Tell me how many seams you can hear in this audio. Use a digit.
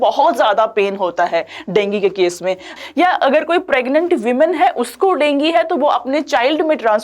1